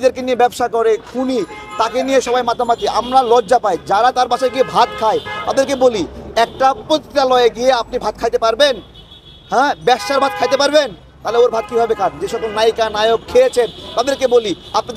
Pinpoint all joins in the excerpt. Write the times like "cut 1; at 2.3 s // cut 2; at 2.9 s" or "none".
none